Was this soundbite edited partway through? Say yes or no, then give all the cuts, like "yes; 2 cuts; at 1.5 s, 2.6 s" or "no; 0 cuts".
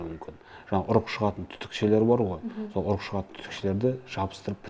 no; 0 cuts